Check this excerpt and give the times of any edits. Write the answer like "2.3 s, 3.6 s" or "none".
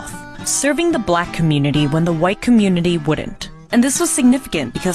2.4 s